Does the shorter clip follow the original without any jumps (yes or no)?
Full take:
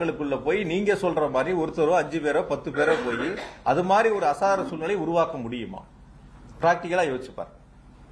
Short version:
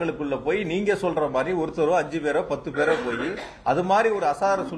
yes